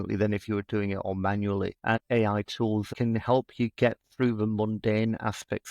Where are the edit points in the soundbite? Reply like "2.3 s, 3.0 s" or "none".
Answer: 1.8 s, 2.9 s

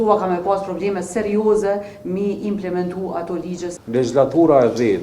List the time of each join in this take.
3.8 s

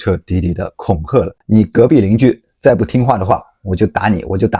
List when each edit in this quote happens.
none

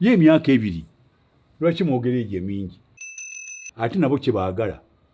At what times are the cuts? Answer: 3.3 s

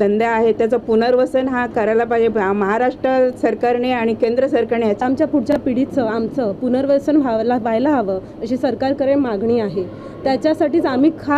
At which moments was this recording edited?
none

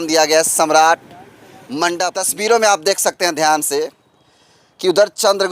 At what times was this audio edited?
2.2 s

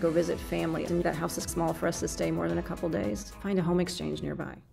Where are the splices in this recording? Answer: 0.9 s, 3.2 s

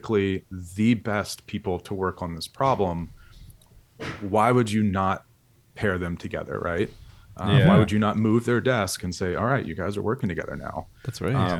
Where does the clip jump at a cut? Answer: none

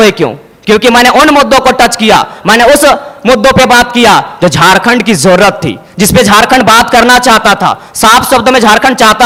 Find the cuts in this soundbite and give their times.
none

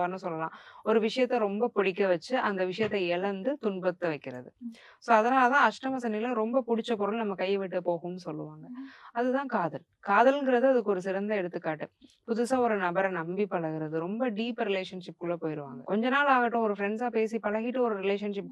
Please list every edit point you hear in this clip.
none

